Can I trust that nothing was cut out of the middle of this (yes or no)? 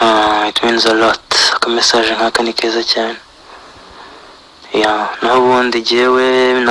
yes